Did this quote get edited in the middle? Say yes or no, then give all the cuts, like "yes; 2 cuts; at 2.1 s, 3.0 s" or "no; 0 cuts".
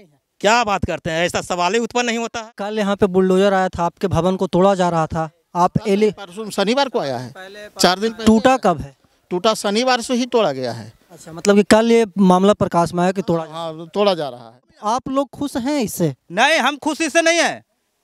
yes; 2 cuts; at 2.7 s, 14.8 s